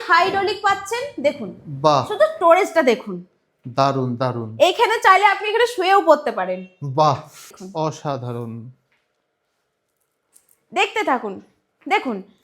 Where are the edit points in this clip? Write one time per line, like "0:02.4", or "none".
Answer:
0:07.5